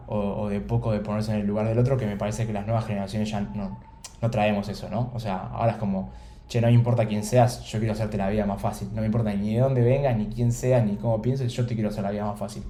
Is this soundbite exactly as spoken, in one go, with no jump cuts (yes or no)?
yes